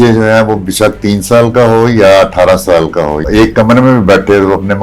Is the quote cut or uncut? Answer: cut